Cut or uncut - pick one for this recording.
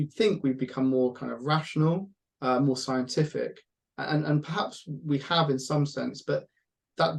uncut